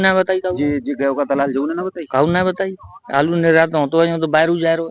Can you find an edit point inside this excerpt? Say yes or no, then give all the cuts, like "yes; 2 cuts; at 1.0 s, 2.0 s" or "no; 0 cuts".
no; 0 cuts